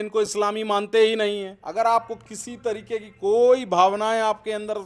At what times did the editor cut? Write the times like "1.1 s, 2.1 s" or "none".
1.6 s